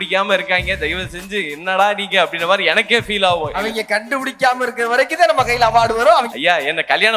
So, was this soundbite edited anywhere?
yes; 2 cuts; at 3.6 s, 6.3 s

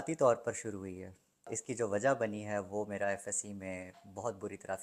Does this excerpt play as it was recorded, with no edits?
no; 1 cut; at 1.5 s

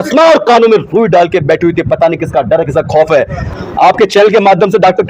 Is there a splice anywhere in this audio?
yes; 1 cut; at 3.4 s

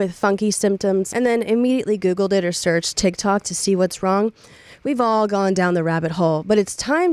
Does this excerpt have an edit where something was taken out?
yes; 1 cut; at 1.1 s

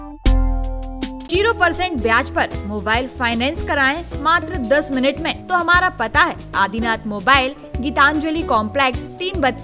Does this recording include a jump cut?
yes; 2 cuts; at 1.3 s, 5.4 s

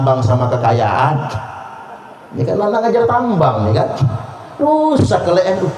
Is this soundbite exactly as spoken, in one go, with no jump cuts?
yes; 0 cuts

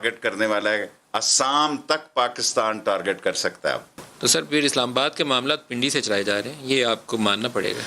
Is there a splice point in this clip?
yes; 1 cut; at 3.9 s

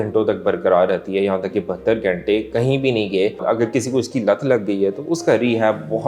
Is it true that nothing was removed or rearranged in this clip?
no; 1 cut; at 3.4 s

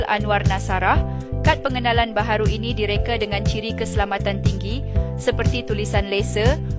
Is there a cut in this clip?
no; 0 cuts

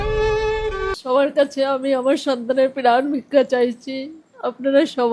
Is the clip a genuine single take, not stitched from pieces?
no; 1 cut; at 0.9 s

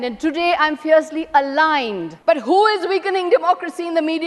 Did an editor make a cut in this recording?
yes; 1 cut; at 2.1 s

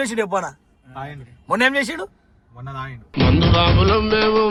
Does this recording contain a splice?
no; 0 cuts

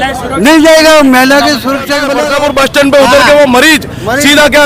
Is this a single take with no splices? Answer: no; 1 cut; at 2.1 s

